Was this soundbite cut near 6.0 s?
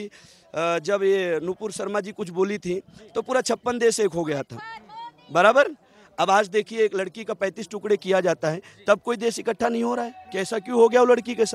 no; 0 cuts

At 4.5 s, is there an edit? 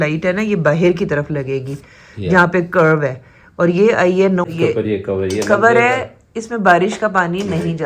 yes; 1 cut; at 4.5 s

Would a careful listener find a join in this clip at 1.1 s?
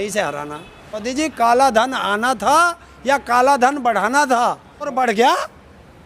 yes; 2 cuts; at 1.1 s, 4.9 s

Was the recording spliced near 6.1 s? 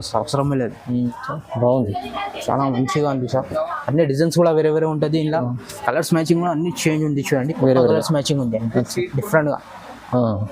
no; 1 cut; at 1.0 s

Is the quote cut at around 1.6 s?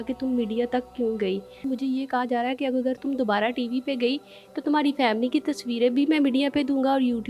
yes; 1 cut; at 1.6 s

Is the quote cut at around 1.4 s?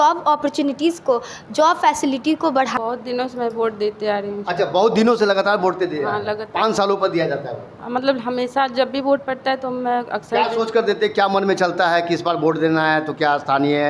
no; 0 cuts

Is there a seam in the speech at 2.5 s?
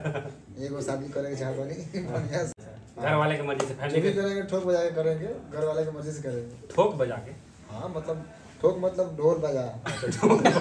yes; 1 cut; at 2.5 s

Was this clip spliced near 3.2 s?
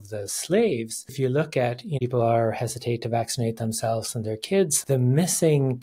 no; 3 cuts; at 1.1 s, 2.0 s, 4.8 s

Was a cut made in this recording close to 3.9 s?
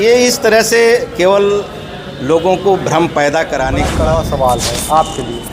yes; 1 cut; at 3.9 s

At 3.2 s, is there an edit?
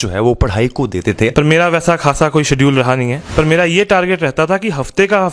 yes; 2 cuts; at 1.3 s, 3.2 s

